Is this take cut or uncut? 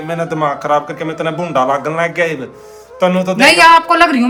uncut